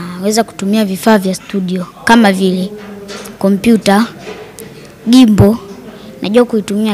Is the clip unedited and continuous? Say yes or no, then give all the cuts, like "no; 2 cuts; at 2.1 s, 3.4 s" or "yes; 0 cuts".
yes; 0 cuts